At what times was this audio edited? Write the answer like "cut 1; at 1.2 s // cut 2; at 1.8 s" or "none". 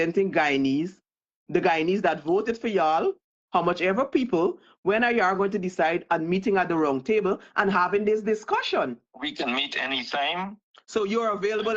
cut 1; at 9.1 s